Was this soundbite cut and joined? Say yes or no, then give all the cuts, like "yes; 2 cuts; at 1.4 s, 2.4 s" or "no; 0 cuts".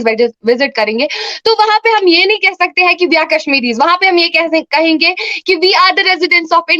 no; 0 cuts